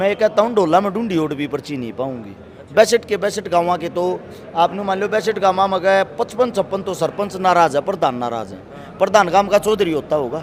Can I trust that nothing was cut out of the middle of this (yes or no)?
yes